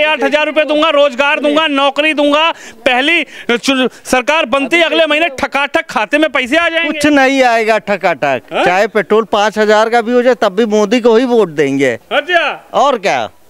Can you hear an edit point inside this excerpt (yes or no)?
no